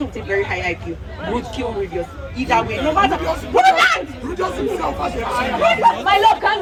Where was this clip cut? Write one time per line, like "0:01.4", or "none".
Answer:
none